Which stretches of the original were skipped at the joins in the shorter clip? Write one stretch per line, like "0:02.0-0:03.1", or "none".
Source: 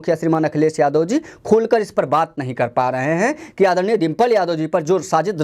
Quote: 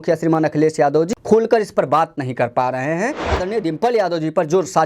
0:01.1-0:01.3
0:03.6-0:03.7